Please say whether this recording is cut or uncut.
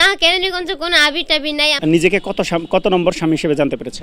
cut